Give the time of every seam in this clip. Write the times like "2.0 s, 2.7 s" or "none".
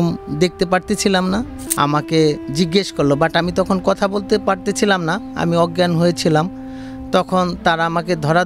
1.6 s